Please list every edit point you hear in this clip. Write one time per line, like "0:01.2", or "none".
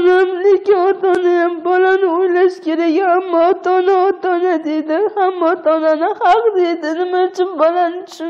none